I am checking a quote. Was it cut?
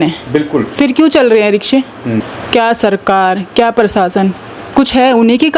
yes; 1 cut; at 2.3 s

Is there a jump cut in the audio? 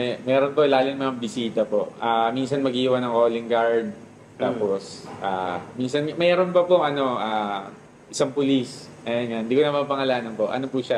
no; 0 cuts

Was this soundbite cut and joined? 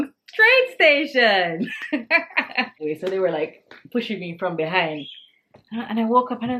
yes; 1 cut; at 2.8 s

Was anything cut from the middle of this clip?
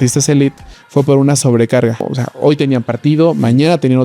yes; 1 cut; at 2.0 s

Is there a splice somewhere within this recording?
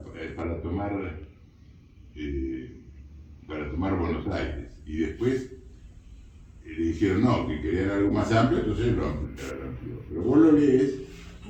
no; 0 cuts

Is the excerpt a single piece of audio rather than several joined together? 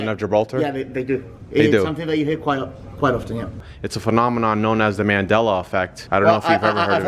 no; 2 cuts; at 3.6 s, 6.0 s

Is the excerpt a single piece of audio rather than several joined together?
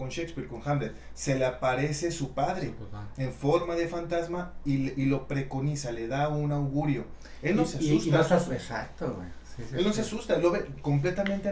yes; 0 cuts

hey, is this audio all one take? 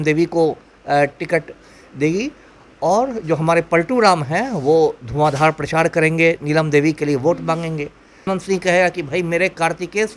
no; 1 cut; at 8.2 s

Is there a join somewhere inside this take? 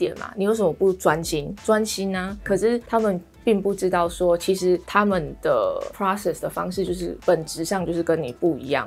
no; 0 cuts

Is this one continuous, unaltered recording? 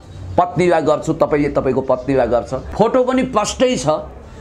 no; 1 cut; at 2.6 s

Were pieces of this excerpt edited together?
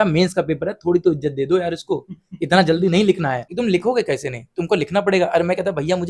yes; 1 cut; at 3.4 s

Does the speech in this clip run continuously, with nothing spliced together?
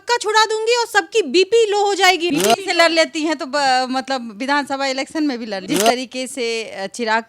no; 2 cuts; at 2.3 s, 5.6 s

